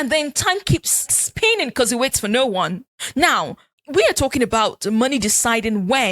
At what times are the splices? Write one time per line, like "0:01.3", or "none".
0:01.2